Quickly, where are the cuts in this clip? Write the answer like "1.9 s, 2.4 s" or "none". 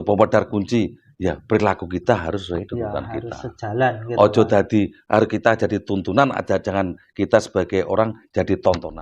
none